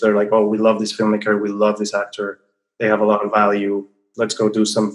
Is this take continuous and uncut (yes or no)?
no